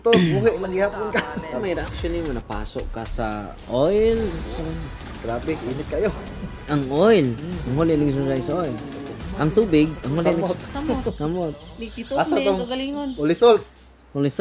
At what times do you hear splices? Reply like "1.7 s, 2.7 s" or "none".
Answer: 1.5 s